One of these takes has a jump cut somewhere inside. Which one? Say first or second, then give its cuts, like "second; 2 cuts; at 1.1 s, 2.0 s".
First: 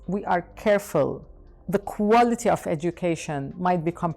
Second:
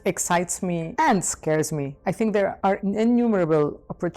second; 1 cut; at 1.9 s